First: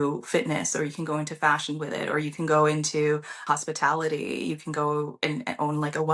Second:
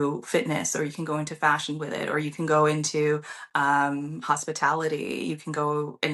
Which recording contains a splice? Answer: first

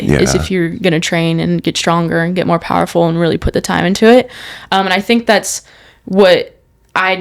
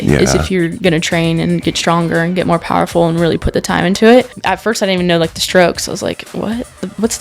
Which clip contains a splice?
second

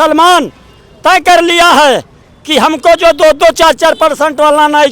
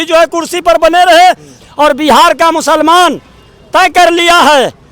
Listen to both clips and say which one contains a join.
second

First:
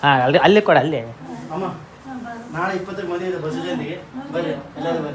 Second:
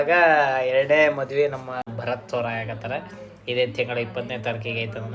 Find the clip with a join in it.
second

